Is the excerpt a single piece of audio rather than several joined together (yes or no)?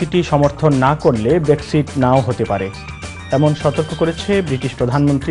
yes